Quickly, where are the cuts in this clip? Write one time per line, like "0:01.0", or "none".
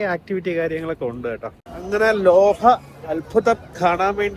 0:01.8